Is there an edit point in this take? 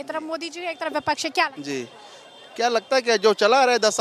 no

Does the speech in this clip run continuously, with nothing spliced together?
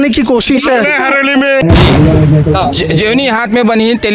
no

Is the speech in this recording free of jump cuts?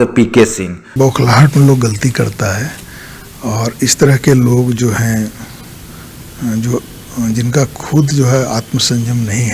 no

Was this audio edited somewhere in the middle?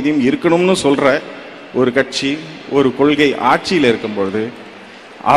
no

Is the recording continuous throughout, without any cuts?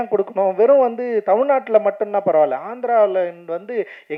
yes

